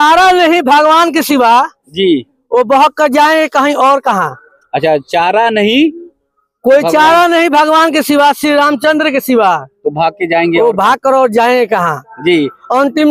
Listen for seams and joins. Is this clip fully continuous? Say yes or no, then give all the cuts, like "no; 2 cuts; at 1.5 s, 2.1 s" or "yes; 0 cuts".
yes; 0 cuts